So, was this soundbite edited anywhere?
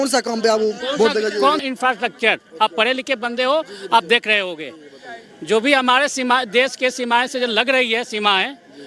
yes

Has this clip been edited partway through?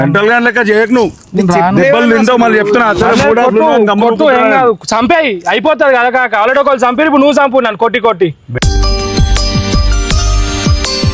no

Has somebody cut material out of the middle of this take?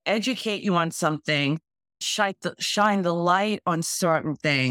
yes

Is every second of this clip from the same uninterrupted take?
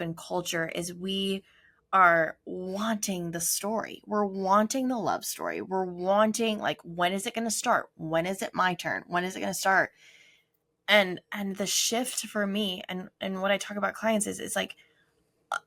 yes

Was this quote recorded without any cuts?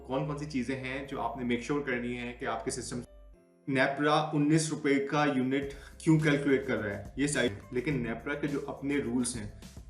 no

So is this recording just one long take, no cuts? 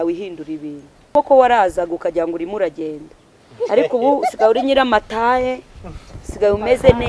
no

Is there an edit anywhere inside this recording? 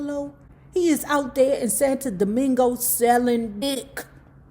yes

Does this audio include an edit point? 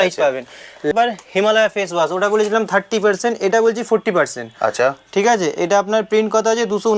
yes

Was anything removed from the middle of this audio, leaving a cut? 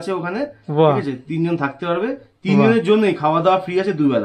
no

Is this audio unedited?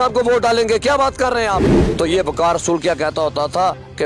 no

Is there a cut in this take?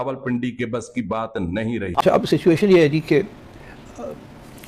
yes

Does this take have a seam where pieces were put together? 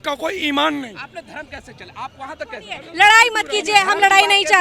no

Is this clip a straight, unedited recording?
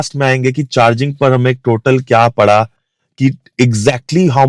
yes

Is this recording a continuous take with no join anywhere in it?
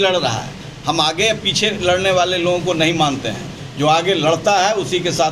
yes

